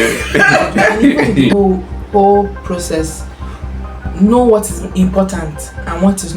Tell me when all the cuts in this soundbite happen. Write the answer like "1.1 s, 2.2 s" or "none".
1.5 s